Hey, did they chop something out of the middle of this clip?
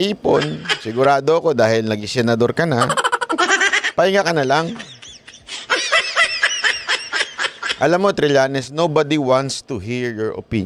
no; 0 cuts

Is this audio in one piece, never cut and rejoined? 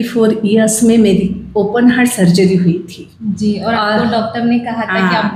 yes; 0 cuts

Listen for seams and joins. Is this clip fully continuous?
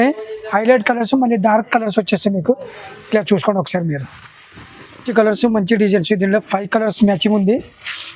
no; 1 cut; at 5.1 s

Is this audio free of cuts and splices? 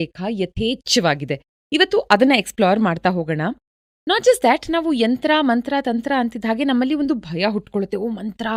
yes; 0 cuts

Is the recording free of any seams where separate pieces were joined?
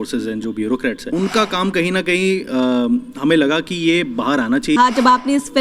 no; 2 cuts; at 1.0 s, 4.8 s

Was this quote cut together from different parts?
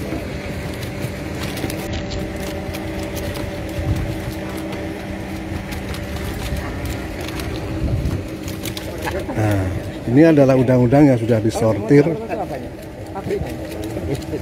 no; 0 cuts

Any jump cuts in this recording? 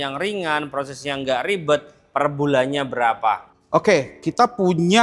no; 0 cuts

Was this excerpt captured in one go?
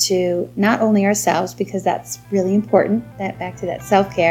yes; 0 cuts

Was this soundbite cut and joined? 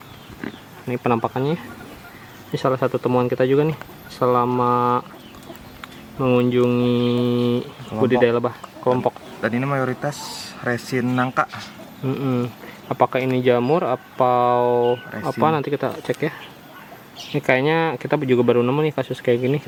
no; 0 cuts

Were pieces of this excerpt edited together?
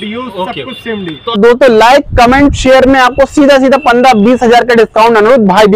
yes; 1 cut; at 1.4 s

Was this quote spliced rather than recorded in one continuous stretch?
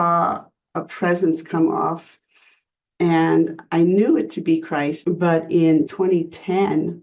yes; 3 cuts; at 2.1 s, 5.0 s, 5.9 s

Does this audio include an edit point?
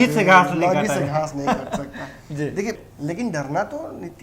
yes; 1 cut; at 2.9 s

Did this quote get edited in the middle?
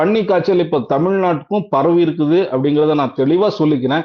no; 0 cuts

